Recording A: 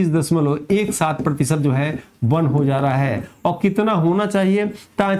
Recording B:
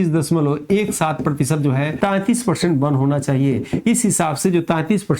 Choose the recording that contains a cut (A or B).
B